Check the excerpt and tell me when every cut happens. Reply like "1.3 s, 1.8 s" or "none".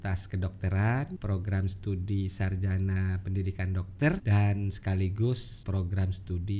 1.2 s, 4.2 s, 5.5 s